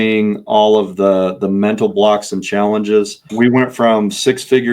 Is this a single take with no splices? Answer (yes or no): no